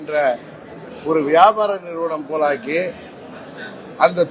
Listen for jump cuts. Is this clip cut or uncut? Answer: uncut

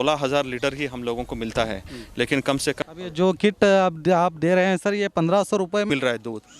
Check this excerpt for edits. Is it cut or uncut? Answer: cut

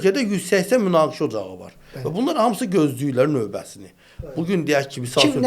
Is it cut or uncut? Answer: uncut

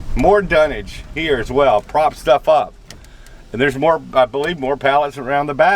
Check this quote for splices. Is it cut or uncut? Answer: uncut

